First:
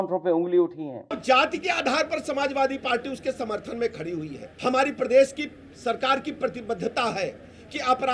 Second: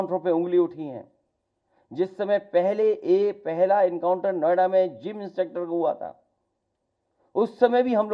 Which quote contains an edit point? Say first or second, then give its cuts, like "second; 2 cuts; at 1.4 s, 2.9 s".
first; 2 cuts; at 1.2 s, 4.4 s